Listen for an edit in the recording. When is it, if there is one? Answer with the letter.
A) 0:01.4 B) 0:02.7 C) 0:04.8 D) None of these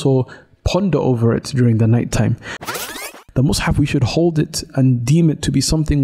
B